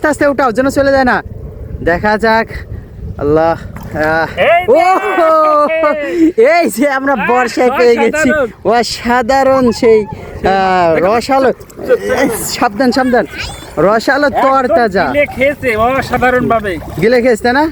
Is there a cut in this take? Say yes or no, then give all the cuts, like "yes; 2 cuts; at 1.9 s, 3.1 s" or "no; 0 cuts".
no; 0 cuts